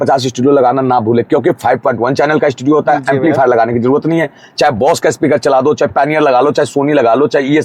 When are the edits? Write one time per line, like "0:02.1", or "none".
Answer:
none